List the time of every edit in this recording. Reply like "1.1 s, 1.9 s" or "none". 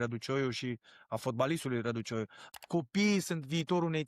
2.4 s